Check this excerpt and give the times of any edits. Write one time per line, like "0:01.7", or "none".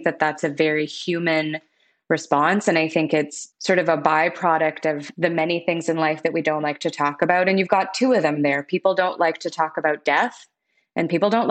0:03.4
0:05.1